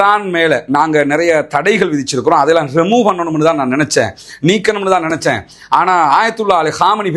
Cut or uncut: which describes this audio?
uncut